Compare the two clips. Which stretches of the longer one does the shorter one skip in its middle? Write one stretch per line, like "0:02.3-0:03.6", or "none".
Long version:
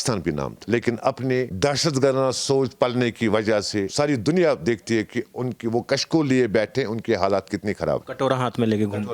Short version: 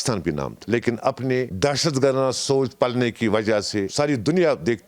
none